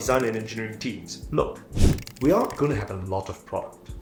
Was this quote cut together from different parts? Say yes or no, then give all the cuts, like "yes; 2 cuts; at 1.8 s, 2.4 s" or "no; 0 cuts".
no; 0 cuts